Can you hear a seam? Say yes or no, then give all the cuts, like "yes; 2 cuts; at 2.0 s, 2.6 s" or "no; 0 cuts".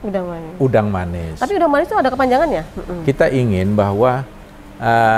yes; 1 cut; at 2.7 s